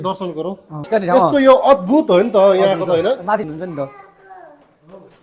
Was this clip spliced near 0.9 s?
yes; 2 cuts; at 0.9 s, 3.4 s

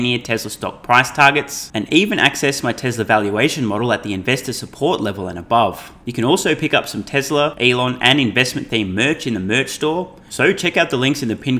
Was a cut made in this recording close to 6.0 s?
yes; 3 cuts; at 6.0 s, 7.5 s, 10.2 s

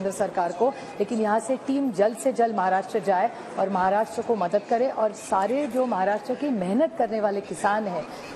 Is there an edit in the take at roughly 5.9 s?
no; 0 cuts

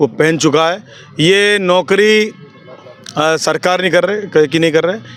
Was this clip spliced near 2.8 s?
no; 0 cuts

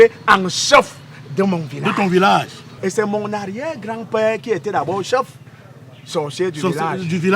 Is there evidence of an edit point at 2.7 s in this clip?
yes; 1 cut; at 2.7 s

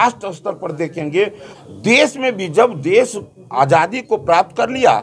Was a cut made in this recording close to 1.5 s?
yes; 1 cut; at 1.5 s

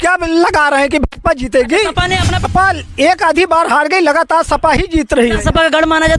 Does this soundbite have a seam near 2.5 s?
yes; 1 cut; at 2.5 s

